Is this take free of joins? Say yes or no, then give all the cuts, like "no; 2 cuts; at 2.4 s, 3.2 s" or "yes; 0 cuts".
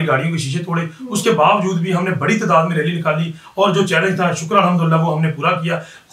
yes; 0 cuts